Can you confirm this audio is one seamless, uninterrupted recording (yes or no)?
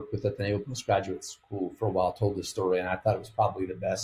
yes